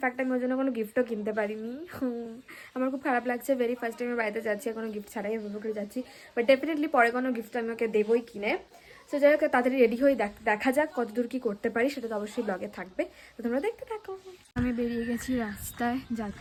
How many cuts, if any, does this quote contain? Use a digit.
0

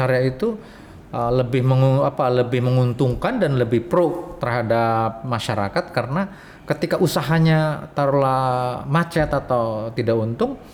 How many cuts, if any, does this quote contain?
0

